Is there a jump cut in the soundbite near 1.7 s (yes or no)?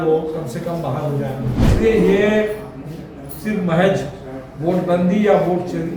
yes